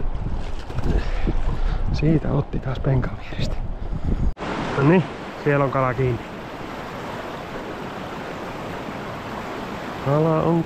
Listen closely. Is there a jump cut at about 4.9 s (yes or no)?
yes